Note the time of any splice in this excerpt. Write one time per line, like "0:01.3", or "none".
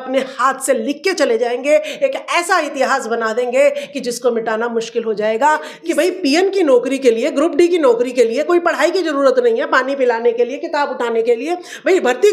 0:05.7